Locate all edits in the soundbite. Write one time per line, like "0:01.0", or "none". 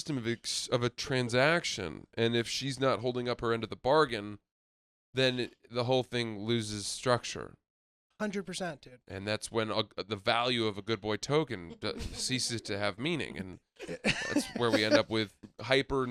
none